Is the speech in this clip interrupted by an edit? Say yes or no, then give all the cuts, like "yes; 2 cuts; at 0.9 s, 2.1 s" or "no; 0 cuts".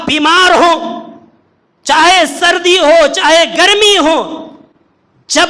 no; 0 cuts